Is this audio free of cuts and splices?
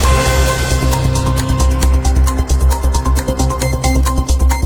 yes; 0 cuts

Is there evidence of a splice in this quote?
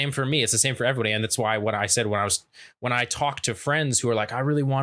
no; 0 cuts

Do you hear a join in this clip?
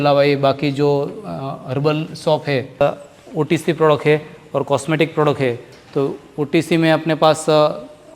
yes; 1 cut; at 2.8 s

